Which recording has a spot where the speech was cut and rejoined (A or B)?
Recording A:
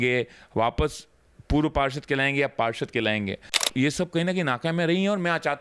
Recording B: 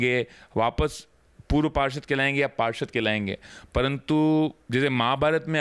A